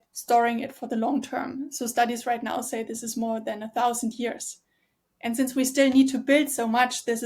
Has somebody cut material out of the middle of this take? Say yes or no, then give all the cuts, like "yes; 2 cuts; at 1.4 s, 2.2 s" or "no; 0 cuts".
no; 0 cuts